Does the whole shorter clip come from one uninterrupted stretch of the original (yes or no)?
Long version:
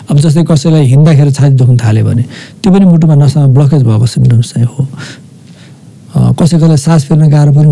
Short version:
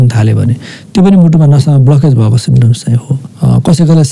no